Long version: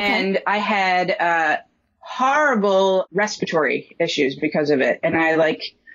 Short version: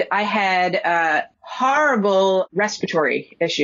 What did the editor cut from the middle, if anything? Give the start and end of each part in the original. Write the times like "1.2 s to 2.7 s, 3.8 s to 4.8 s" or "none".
1.7 s to 2.0 s